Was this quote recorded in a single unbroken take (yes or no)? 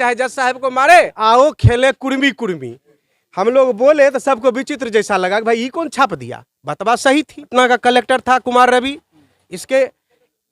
no